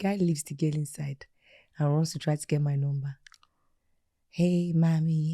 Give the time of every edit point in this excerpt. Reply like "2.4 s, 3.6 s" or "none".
none